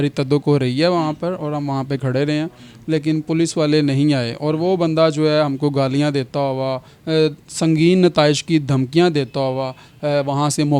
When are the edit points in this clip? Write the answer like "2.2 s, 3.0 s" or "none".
none